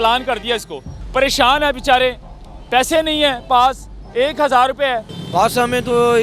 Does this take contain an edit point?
yes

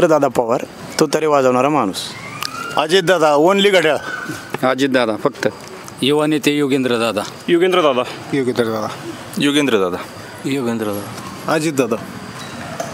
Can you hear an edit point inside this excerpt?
no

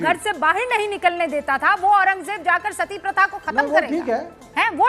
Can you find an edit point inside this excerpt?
no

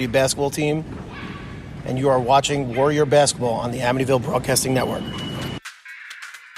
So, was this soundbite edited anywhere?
yes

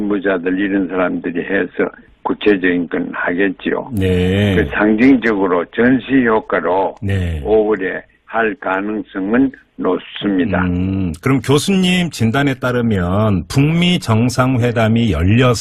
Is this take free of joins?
yes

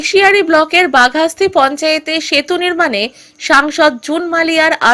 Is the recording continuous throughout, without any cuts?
yes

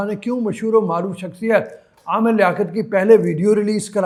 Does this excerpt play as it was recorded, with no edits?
yes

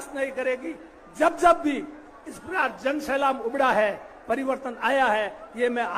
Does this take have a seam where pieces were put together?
no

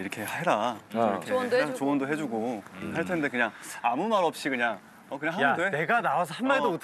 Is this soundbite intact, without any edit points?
yes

